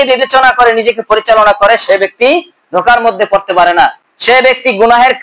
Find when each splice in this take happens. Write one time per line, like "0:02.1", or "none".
none